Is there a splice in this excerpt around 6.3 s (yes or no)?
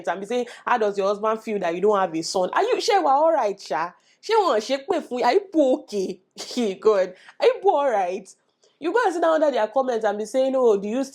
no